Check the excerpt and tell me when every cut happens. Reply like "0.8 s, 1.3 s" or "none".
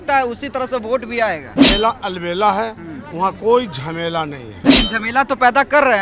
1.5 s, 4.7 s